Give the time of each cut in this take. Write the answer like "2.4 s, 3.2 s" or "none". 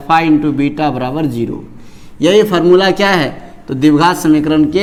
none